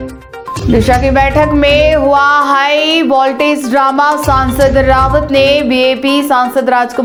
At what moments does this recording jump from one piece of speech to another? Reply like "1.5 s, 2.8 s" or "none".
none